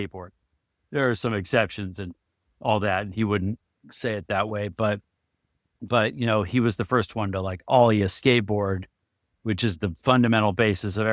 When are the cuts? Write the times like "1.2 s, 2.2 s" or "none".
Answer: none